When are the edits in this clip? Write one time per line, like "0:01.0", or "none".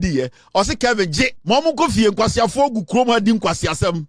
0:01.4